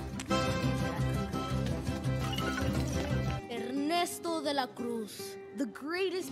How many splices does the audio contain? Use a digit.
0